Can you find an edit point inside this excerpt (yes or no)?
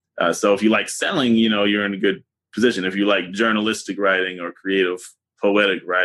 no